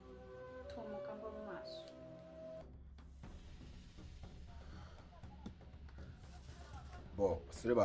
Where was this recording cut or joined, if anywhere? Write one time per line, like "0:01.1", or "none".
0:02.6